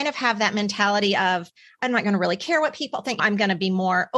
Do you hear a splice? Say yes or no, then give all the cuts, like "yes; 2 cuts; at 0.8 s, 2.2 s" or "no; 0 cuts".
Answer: yes; 1 cut; at 3.2 s